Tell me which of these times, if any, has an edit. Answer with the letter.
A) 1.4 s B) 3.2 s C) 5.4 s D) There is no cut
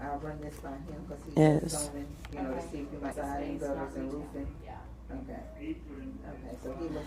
B